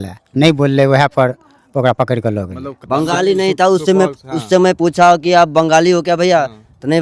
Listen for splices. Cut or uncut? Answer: cut